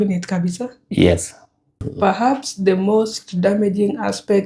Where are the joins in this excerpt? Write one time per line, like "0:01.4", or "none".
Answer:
0:01.9